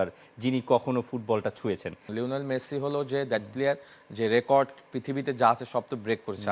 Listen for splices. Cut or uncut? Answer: cut